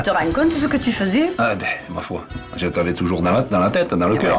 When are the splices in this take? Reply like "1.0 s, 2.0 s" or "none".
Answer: none